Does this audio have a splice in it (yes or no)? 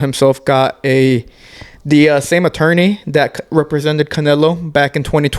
no